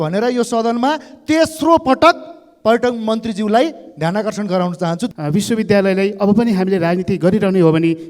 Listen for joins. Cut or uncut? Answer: cut